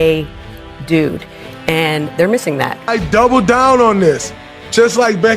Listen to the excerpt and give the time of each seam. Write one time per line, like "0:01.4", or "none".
0:02.8